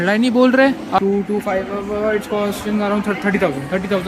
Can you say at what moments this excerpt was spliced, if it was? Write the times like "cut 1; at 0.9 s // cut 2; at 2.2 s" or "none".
cut 1; at 1.0 s